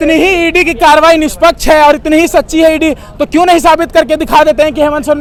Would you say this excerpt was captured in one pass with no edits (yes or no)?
yes